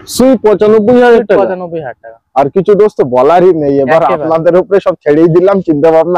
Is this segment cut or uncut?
uncut